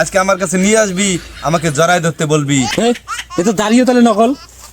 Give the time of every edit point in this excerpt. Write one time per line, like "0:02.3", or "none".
0:02.7